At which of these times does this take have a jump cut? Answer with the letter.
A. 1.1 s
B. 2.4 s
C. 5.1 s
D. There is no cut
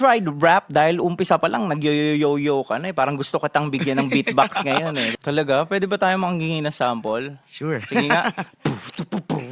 C